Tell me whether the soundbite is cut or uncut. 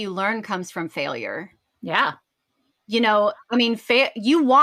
uncut